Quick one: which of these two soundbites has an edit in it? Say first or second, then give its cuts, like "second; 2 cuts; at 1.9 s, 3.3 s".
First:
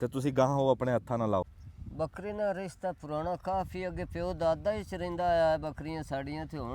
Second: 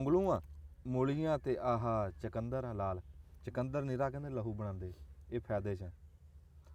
first; 1 cut; at 1.6 s